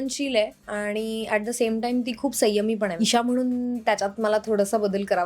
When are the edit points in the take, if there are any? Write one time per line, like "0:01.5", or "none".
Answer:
0:02.9